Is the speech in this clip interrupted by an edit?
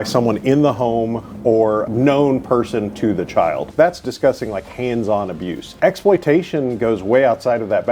yes; 3 cuts; at 1.9 s, 3.6 s, 5.7 s

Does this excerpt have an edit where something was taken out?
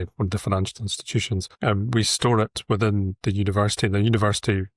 no; 0 cuts

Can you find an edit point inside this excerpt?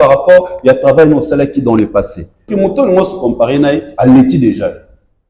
yes; 1 cut; at 2.5 s

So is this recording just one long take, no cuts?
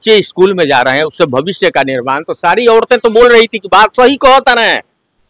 yes; 0 cuts

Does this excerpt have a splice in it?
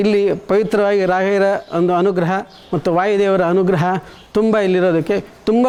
no; 0 cuts

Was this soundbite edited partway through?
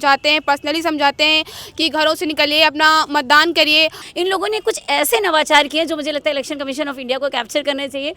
yes; 1 cut; at 4.0 s

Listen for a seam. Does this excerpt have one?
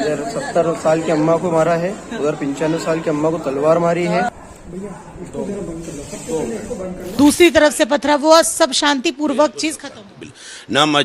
yes; 2 cuts; at 4.3 s, 7.1 s

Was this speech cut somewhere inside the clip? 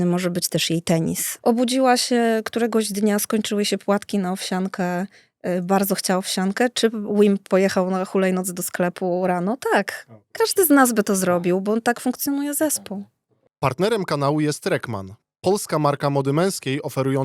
yes; 2 cuts; at 1.3 s, 13.4 s

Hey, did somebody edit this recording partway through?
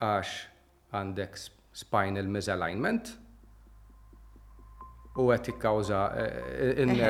no; 0 cuts

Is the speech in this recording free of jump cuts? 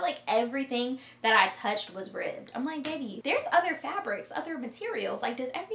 no; 1 cut; at 3.2 s

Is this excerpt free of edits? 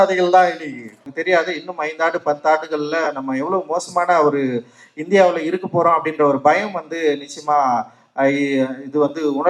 no; 1 cut; at 1.1 s

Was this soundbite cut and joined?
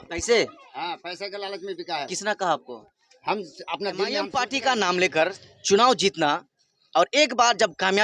yes; 1 cut; at 4.3 s

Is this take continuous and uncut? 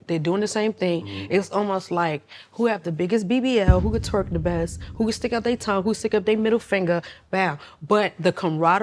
yes; 0 cuts

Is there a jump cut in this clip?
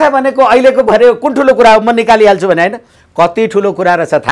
no; 0 cuts

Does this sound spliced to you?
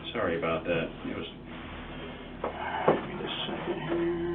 yes; 1 cut; at 1.5 s

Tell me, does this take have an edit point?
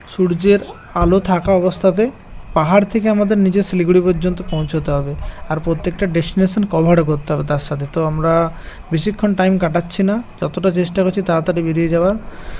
no; 0 cuts

